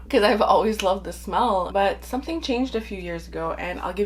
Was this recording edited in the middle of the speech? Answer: yes; 1 cut; at 1.7 s

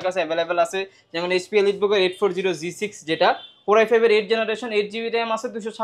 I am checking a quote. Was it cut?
no; 0 cuts

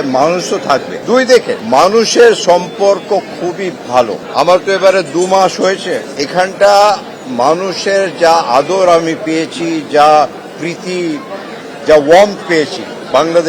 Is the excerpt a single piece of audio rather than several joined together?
no; 4 cuts; at 0.9 s, 1.6 s, 4.2 s, 6.1 s

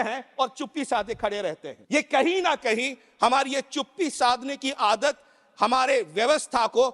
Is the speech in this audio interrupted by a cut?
yes; 1 cut; at 1.7 s

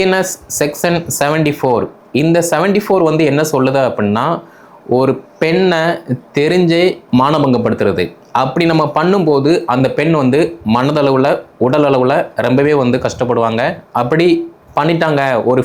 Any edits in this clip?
no; 0 cuts

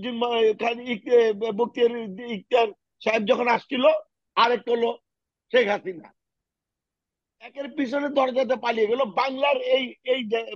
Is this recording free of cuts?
yes; 0 cuts

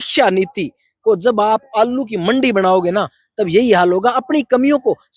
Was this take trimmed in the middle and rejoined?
no; 0 cuts

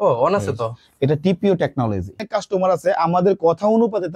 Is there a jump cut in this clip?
yes; 1 cut; at 2.3 s

